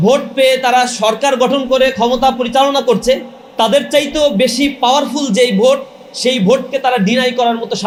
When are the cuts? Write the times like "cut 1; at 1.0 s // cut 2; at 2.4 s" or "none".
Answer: none